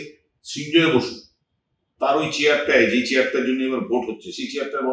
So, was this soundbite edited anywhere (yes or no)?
no